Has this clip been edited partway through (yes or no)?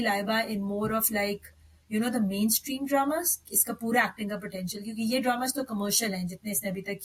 no